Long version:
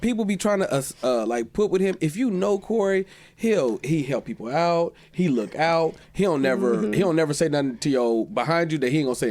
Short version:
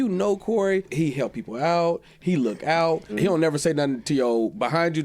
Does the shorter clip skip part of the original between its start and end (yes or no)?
yes